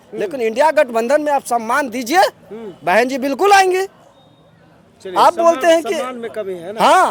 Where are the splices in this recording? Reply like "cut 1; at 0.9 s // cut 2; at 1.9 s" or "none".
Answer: none